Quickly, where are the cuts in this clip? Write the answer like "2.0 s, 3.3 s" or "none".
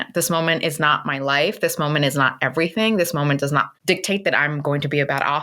3.7 s